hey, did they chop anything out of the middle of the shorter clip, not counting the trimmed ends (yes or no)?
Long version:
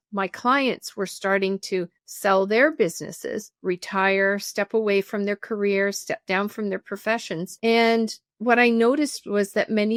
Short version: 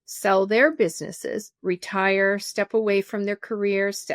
no